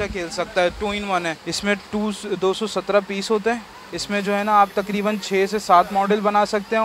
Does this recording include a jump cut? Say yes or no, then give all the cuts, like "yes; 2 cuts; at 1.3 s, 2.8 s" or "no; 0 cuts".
yes; 1 cut; at 1.4 s